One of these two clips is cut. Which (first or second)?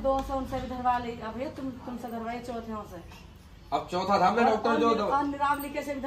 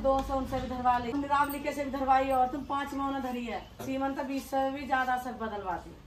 second